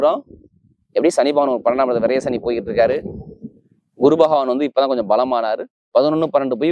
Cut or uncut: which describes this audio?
uncut